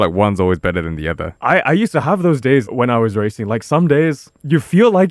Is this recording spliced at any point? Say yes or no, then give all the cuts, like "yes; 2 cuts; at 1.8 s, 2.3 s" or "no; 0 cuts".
yes; 2 cuts; at 1.3 s, 2.7 s